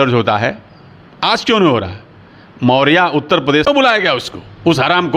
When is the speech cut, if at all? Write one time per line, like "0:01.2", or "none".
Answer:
0:03.7